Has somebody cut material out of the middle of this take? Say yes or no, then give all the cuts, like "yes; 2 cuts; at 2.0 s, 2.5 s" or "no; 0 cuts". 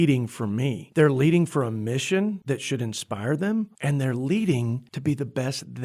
yes; 4 cuts; at 0.8 s, 2.4 s, 3.7 s, 4.9 s